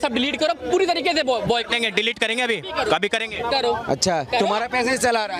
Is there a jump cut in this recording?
no; 0 cuts

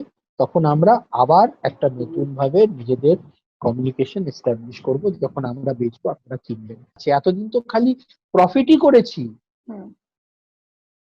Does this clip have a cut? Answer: yes; 1 cut; at 7.0 s

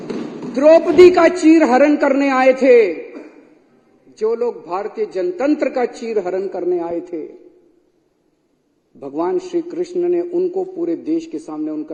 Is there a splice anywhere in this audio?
no; 0 cuts

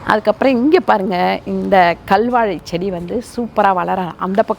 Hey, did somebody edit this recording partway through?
no; 0 cuts

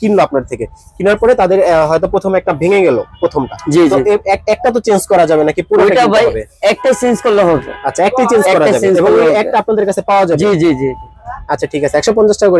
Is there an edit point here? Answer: no; 0 cuts

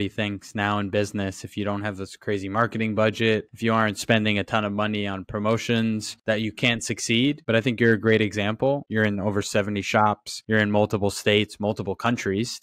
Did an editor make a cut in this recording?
yes; 1 cut; at 8.9 s

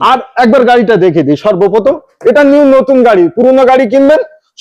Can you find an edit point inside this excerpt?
no; 0 cuts

